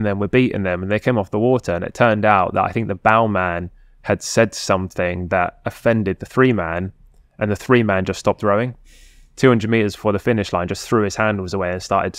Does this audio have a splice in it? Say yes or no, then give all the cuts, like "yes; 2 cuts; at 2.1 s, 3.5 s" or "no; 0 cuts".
no; 0 cuts